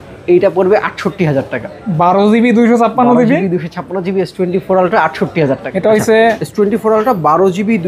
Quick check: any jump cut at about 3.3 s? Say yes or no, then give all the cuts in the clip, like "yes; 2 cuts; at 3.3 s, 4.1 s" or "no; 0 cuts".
no; 1 cut; at 5.7 s